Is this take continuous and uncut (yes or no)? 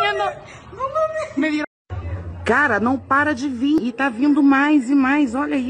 no